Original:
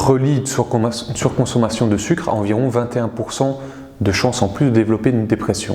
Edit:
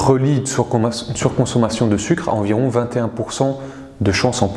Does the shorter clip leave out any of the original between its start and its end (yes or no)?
no